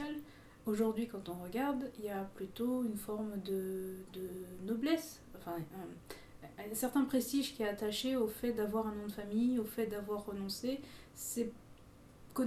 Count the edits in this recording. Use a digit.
0